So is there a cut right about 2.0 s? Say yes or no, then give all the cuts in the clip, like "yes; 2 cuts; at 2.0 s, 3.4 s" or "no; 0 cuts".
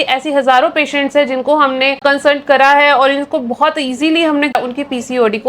yes; 2 cuts; at 2.0 s, 4.5 s